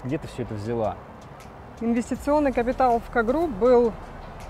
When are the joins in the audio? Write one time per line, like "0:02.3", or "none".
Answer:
none